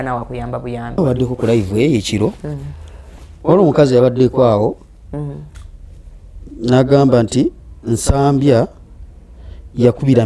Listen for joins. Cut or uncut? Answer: cut